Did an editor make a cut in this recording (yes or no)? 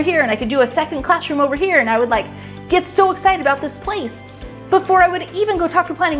no